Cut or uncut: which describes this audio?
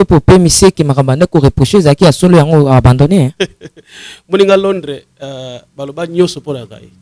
cut